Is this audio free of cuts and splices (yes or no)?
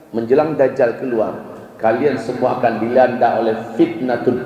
yes